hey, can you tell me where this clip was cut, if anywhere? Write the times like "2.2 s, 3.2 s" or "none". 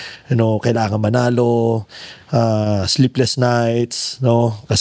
none